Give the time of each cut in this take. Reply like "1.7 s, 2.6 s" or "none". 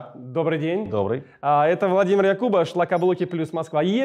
none